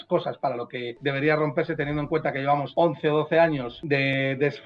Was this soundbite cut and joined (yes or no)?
yes